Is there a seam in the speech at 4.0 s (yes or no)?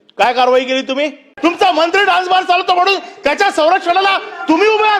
no